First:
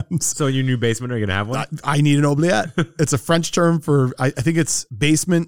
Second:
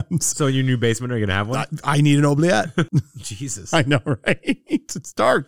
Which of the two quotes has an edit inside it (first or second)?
second